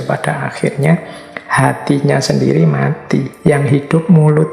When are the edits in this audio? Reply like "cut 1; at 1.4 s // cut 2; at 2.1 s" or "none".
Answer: cut 1; at 3.3 s